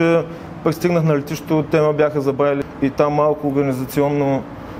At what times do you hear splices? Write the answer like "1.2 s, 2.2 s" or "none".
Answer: 2.6 s